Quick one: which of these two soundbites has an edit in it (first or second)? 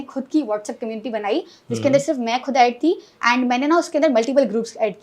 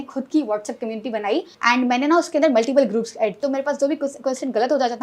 second